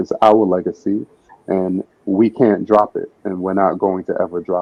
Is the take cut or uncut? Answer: uncut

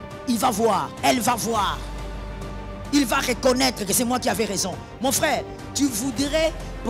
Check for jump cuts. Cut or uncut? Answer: cut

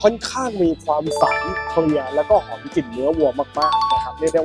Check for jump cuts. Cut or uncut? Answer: uncut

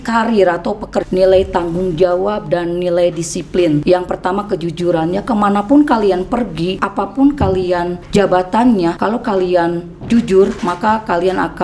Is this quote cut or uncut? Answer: cut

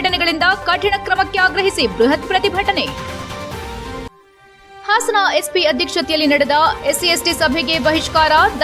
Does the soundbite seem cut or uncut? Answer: uncut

